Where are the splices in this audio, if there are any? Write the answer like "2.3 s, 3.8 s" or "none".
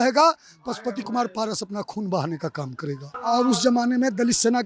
3.1 s